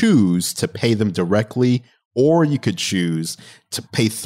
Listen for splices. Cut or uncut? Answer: cut